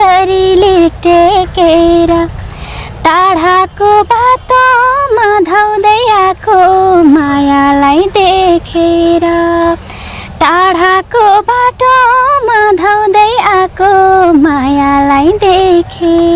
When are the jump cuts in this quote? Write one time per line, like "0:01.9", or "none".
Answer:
none